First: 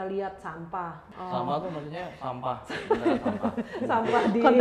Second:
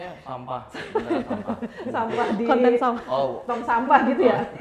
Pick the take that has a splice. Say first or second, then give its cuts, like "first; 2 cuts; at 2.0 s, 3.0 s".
first; 1 cut; at 1.0 s